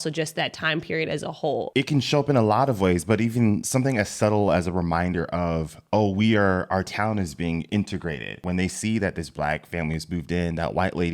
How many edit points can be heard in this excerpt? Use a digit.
3